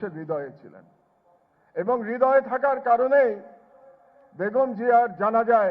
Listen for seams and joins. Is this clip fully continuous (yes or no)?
yes